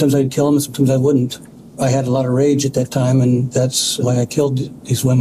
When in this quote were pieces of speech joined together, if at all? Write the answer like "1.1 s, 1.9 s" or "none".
3.9 s